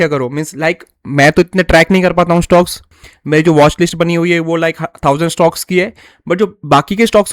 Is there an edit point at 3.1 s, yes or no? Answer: yes